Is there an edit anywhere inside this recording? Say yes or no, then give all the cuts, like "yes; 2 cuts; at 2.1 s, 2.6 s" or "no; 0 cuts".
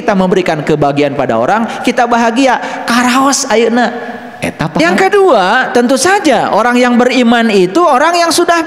yes; 1 cut; at 4.8 s